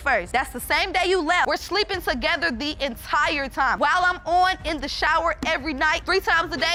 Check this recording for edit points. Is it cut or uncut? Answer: uncut